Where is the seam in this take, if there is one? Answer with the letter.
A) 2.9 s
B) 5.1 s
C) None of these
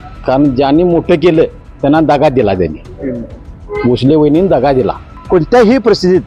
B